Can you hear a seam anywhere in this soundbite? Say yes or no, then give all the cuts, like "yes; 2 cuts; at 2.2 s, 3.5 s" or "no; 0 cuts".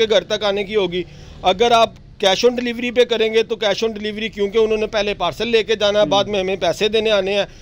no; 0 cuts